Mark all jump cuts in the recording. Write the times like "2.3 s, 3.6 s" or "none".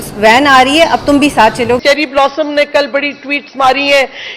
1.8 s